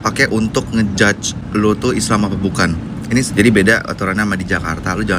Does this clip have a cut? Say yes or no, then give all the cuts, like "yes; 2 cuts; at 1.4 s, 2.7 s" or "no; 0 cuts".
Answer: yes; 1 cut; at 3.3 s